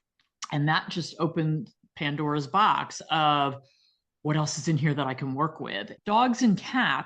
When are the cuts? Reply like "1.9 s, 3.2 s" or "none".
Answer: 5.9 s